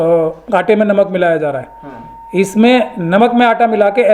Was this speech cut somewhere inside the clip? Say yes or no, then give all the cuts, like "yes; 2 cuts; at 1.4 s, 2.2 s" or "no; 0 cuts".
no; 0 cuts